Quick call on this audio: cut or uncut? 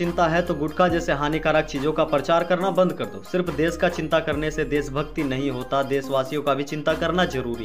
uncut